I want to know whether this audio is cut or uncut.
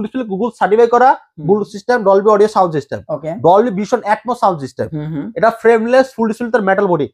uncut